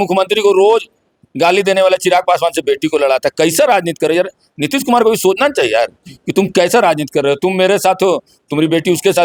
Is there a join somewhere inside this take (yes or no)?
no